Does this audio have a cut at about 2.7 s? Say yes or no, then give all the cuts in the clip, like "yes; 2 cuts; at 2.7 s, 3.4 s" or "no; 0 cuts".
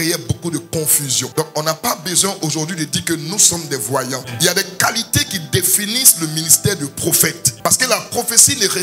no; 1 cut; at 4.2 s